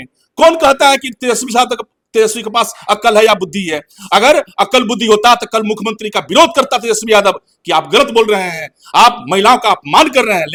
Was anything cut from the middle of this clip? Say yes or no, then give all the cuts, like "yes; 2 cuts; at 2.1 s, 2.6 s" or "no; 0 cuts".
no; 0 cuts